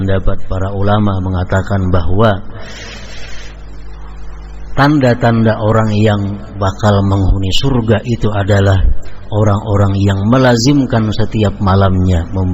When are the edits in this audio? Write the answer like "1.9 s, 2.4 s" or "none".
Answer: none